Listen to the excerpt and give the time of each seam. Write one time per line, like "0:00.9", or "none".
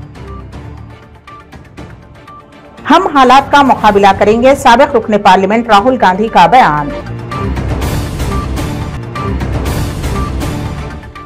0:02.1